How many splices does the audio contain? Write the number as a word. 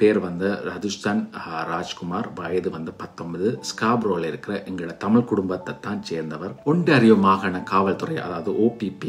one